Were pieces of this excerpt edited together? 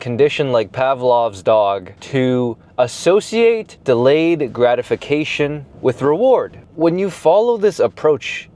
yes; 4 cuts; at 1.9 s, 3.7 s, 5.7 s, 6.6 s

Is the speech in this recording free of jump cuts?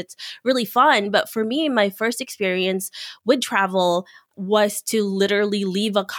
no; 1 cut; at 4.3 s

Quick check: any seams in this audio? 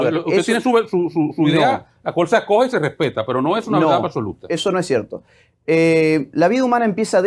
yes; 1 cut; at 4.4 s

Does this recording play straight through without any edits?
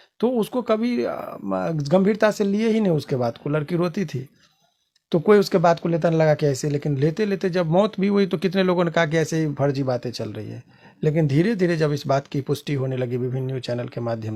yes; 0 cuts

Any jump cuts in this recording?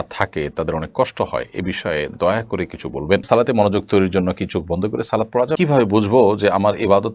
yes; 2 cuts; at 3.2 s, 5.5 s

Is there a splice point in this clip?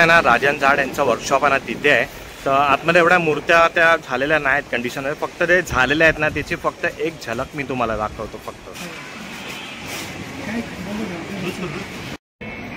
no; 0 cuts

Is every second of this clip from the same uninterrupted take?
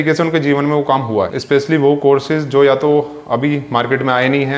no; 1 cut; at 1.4 s

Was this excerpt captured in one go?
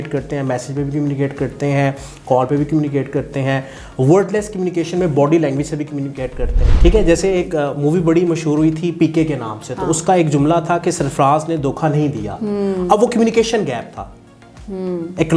no; 1 cut; at 6.7 s

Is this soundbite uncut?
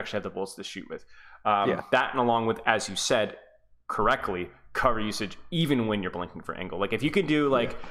yes; 0 cuts

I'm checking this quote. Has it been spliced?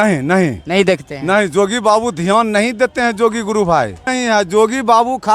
yes; 1 cut; at 4.1 s

